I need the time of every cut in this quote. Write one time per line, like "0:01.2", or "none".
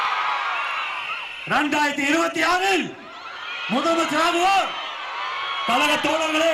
none